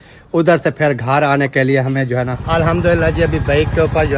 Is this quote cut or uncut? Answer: cut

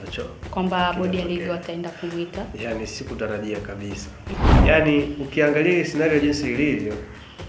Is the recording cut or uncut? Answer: cut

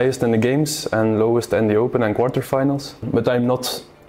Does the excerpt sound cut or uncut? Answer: cut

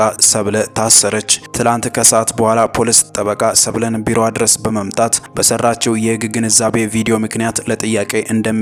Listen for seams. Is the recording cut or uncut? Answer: uncut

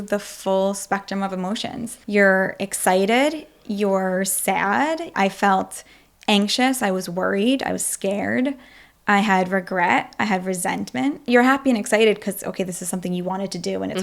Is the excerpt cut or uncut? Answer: cut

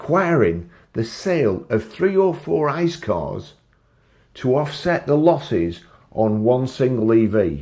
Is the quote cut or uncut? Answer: uncut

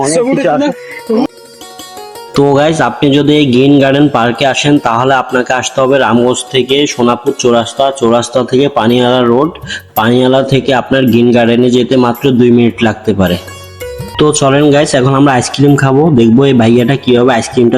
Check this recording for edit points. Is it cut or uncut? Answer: cut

